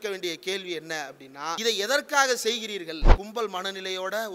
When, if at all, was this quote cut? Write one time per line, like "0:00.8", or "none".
0:01.6
0:03.2